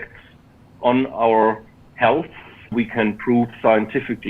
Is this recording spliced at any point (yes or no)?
yes